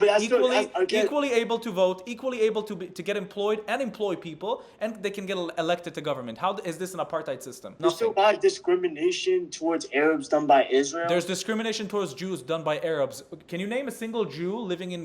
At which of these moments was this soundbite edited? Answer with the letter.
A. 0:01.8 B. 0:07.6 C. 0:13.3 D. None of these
B